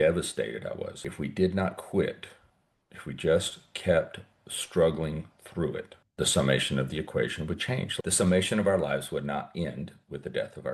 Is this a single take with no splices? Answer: no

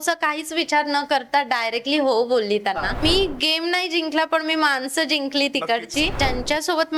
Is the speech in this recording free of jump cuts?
no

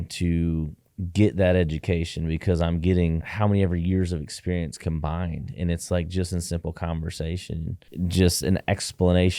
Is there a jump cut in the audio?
no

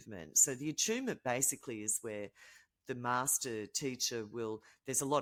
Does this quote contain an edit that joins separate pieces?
no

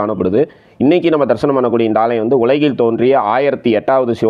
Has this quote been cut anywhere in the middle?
no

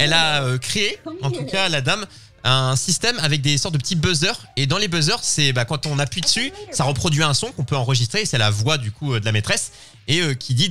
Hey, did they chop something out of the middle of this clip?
no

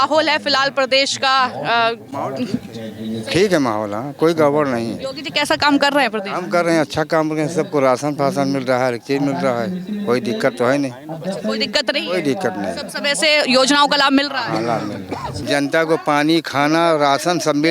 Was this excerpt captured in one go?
no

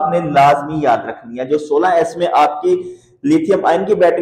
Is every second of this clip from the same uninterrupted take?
yes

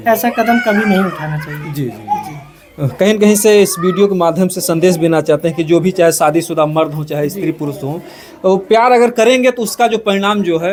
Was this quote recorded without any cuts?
yes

